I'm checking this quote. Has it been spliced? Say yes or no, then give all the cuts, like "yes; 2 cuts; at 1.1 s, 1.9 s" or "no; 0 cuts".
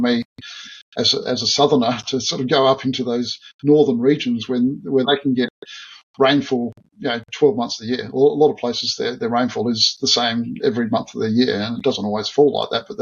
no; 0 cuts